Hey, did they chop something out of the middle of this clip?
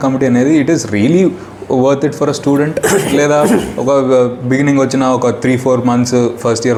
no; 0 cuts

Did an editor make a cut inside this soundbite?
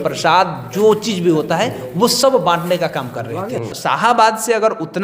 yes; 1 cut; at 3.7 s

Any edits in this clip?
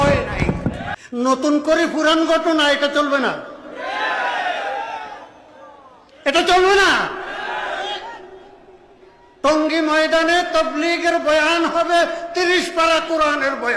yes; 1 cut; at 0.9 s

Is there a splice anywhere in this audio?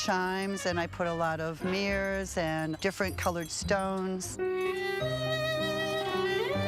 no; 0 cuts

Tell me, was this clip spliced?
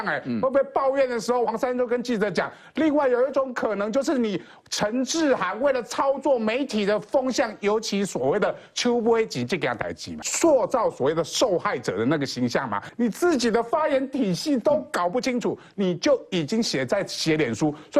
yes; 2 cuts; at 10.3 s, 12.8 s

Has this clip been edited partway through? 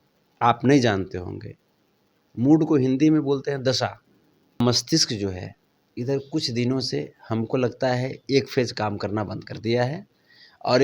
yes; 1 cut; at 4.6 s

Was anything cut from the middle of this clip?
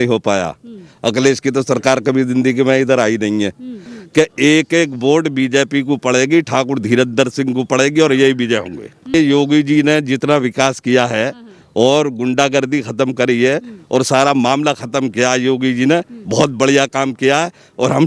yes; 2 cuts; at 3.9 s, 9.1 s

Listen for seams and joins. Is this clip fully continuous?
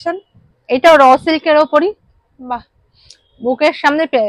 yes; 0 cuts

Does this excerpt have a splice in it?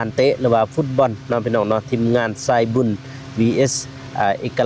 no; 0 cuts

